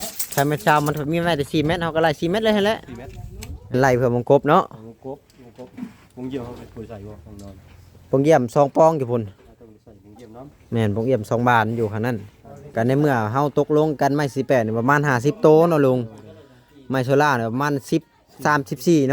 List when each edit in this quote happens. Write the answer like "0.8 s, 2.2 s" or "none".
3.7 s, 12.6 s